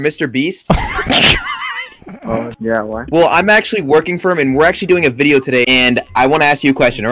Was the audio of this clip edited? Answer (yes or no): yes